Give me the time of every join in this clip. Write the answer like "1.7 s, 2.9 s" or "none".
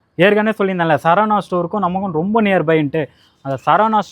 none